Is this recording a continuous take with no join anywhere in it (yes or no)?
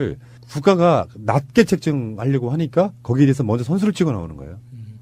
yes